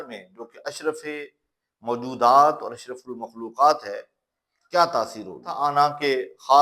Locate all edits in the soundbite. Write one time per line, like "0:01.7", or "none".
0:05.6